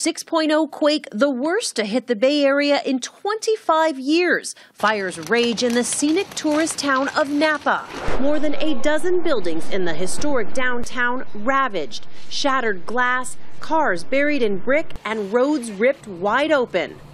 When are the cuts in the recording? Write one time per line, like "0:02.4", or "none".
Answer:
0:06.8